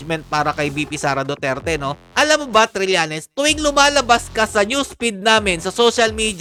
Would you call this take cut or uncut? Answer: uncut